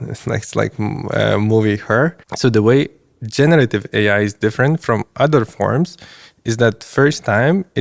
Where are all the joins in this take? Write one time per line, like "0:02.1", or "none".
0:02.3